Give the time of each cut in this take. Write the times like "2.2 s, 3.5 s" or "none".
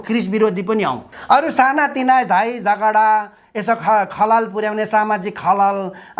1.1 s